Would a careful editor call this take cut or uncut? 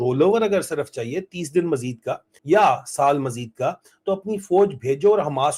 uncut